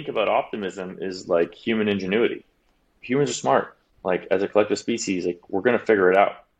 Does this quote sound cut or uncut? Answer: uncut